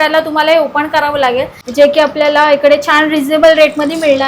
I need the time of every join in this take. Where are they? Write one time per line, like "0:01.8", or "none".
0:01.6

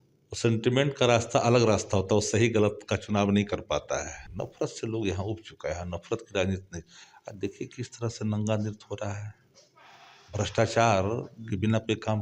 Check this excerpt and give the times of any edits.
0:04.2

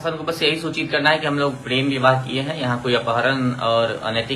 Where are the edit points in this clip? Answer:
none

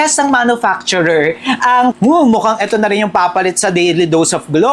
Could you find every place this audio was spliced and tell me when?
0:02.0

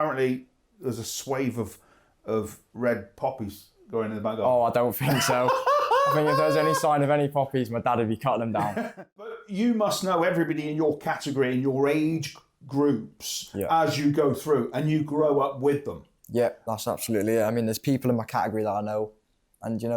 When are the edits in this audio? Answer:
0:09.3

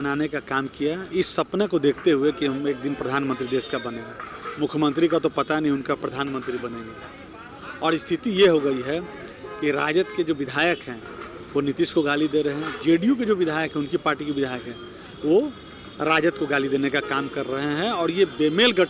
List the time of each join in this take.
none

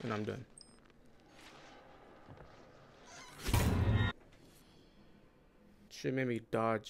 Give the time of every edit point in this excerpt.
0:05.9

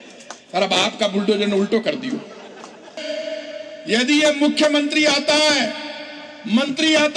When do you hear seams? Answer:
0:02.9

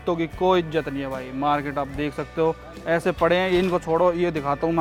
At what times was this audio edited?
none

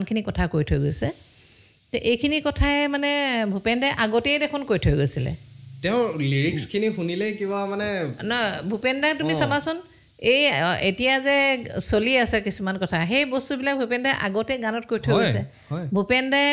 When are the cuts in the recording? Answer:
none

